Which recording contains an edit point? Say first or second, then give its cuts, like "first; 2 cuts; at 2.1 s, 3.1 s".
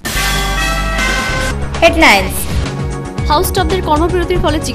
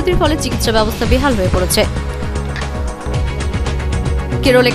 first; 1 cut; at 2.5 s